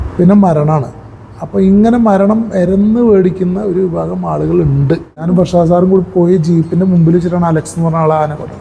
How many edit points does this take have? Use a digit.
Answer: 1